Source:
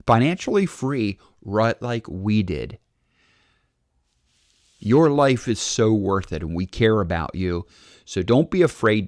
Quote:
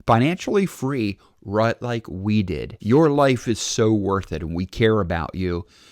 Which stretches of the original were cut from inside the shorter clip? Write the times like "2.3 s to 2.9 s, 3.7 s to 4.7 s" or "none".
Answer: 2.7 s to 4.7 s